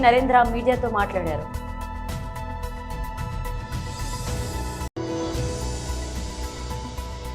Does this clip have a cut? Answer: no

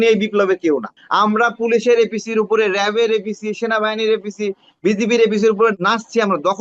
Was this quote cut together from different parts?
yes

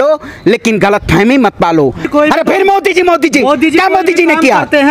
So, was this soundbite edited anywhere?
yes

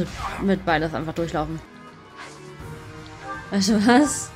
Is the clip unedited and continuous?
no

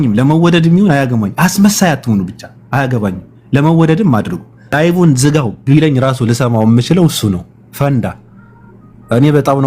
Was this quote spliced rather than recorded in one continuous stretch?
yes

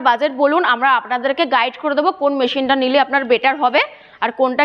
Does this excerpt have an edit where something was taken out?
no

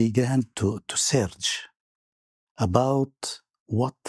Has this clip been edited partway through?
no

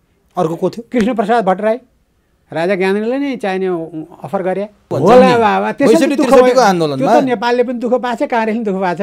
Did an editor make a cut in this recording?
yes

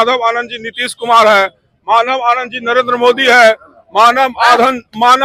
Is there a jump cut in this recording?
no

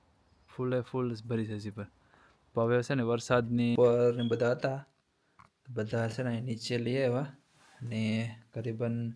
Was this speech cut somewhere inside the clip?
yes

